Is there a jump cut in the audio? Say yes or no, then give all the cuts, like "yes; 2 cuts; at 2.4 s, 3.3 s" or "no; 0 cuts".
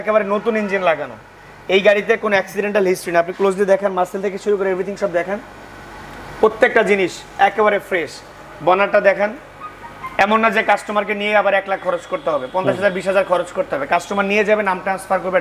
no; 0 cuts